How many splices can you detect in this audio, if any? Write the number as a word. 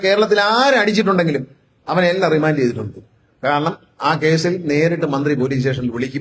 zero